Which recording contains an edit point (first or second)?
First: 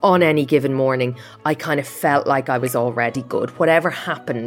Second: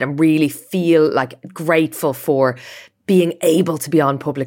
first